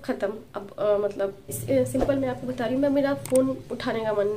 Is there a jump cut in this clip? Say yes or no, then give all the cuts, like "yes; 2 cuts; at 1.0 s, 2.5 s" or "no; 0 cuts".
yes; 1 cut; at 1.6 s